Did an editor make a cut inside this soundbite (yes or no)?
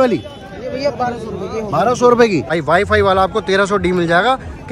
yes